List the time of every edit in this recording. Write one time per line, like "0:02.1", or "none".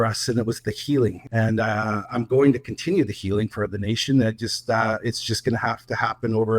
0:01.2